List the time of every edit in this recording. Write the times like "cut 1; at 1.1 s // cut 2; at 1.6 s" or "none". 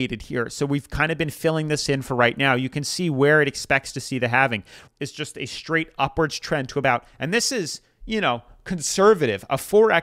cut 1; at 4.8 s